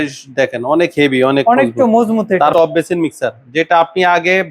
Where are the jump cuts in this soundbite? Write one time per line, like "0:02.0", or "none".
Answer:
0:02.5